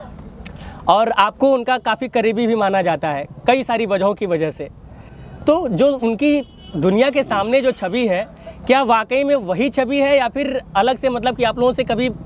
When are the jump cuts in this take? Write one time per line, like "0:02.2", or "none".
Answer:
none